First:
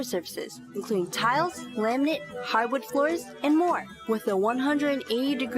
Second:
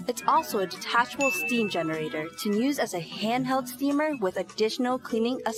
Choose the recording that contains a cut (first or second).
first